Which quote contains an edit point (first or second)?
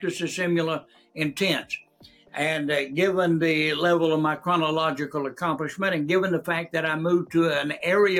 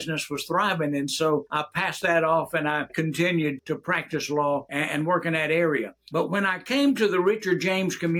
second